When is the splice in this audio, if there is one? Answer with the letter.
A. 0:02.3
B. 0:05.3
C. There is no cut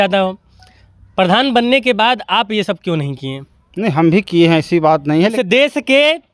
B